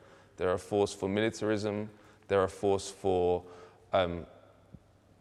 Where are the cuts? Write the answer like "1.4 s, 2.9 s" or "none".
none